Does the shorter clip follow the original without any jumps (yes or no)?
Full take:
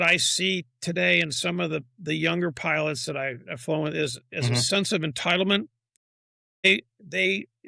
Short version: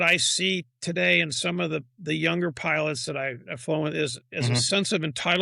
yes